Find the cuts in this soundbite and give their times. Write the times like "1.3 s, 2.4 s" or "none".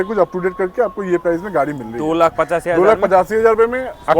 none